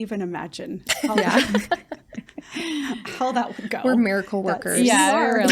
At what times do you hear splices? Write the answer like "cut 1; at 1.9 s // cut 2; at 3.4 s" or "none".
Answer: none